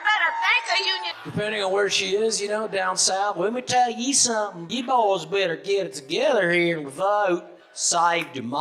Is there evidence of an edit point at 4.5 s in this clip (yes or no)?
no